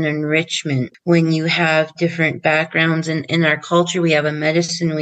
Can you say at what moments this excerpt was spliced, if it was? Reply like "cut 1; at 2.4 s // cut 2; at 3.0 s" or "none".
cut 1; at 0.9 s